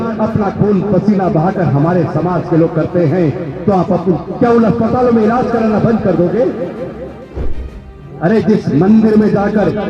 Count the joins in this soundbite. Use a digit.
1